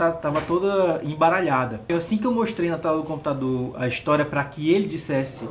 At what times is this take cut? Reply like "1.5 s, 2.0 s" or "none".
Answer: 1.9 s